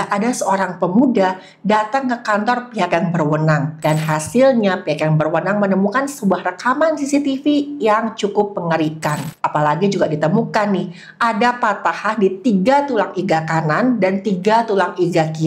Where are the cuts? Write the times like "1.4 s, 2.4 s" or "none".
3.7 s, 9.3 s

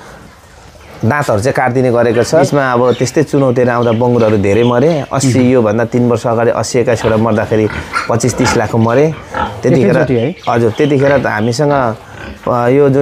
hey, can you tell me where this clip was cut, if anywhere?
2.4 s

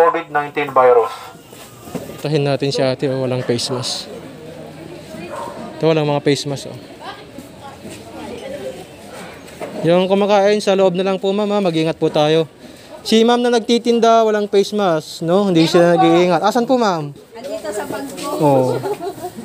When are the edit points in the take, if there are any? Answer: 2.0 s

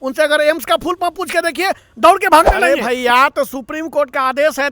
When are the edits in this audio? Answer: 2.6 s

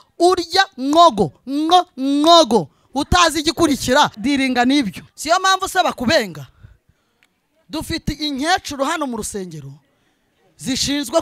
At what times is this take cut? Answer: 4.2 s, 5.1 s

